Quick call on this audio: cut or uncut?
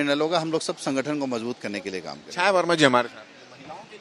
uncut